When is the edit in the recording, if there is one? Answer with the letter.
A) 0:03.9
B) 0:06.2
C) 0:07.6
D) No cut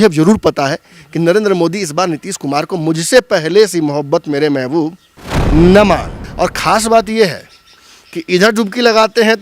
B